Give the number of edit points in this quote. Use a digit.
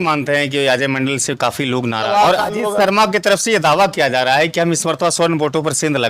1